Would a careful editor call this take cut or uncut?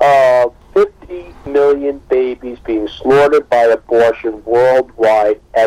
uncut